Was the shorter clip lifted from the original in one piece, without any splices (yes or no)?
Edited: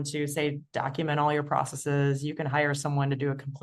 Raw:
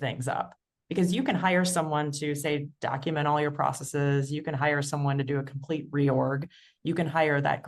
yes